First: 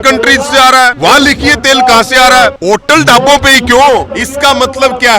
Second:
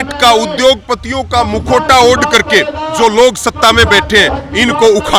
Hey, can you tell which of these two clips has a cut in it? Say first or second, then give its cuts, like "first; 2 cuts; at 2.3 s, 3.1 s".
first; 3 cuts; at 0.9 s, 2.6 s, 4.2 s